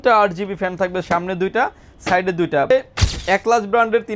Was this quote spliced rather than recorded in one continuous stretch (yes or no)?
yes